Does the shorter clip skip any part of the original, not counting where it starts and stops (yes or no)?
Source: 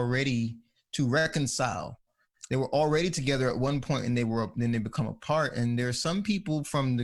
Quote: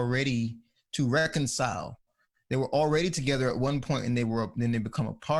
no